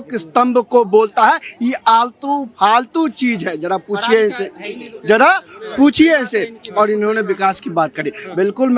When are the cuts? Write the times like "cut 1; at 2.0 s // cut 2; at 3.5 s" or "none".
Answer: none